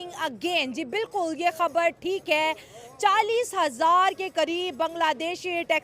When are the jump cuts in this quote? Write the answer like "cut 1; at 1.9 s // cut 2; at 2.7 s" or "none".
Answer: none